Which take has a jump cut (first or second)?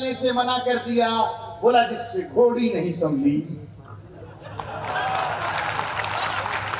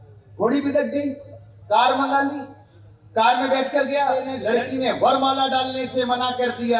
second